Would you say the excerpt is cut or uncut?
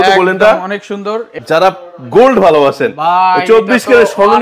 cut